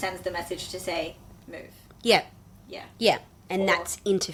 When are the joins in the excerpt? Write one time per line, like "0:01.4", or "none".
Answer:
none